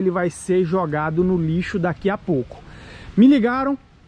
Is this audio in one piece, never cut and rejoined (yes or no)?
yes